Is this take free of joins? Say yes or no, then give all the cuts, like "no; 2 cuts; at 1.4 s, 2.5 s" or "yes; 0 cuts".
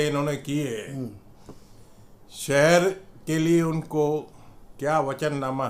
yes; 0 cuts